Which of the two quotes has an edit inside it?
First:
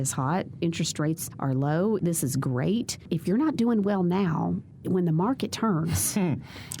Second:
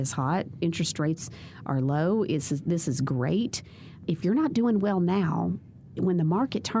first; 4 cuts; at 1.3 s, 2.0 s, 3.0 s, 4.7 s

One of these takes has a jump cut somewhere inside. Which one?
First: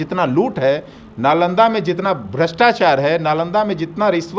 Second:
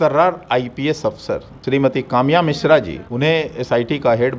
second; 2 cuts; at 1.5 s, 3.0 s

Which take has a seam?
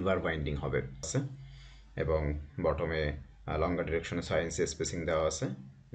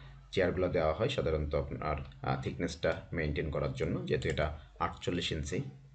first; 1 cut; at 1.1 s

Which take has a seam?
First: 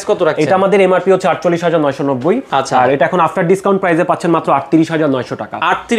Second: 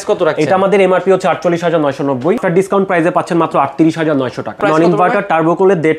second; 2 cuts; at 2.4 s, 4.6 s

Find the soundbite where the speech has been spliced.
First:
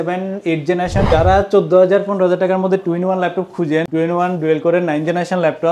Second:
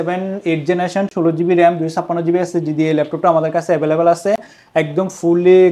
first; 2 cuts; at 1.1 s, 3.9 s

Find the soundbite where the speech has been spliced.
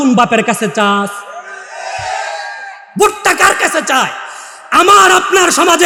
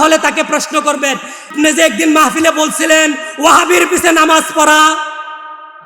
second; 1 cut; at 1.5 s

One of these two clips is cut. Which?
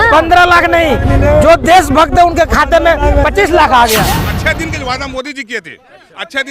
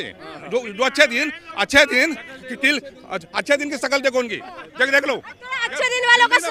first; 1 cut; at 4.0 s

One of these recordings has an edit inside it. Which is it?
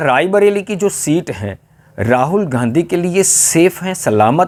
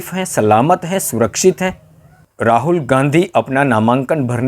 second; 1 cut; at 2.3 s

